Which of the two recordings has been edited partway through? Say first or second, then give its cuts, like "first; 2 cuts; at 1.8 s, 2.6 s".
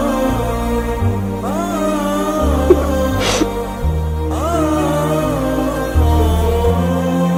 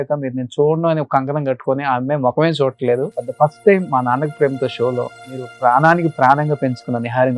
second; 2 cuts; at 3.2 s, 5.5 s